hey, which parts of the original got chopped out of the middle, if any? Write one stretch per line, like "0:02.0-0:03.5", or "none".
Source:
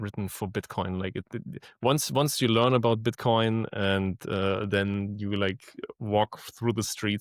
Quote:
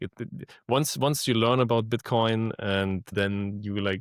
0:04.2-0:04.6